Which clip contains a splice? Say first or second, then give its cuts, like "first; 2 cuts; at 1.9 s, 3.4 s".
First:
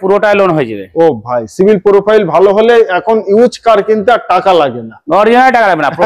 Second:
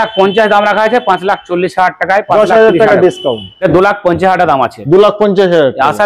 second; 1 cut; at 3.5 s